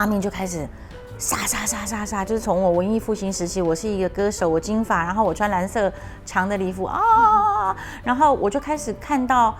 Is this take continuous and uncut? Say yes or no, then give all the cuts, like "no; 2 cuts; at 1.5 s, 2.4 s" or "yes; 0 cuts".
yes; 0 cuts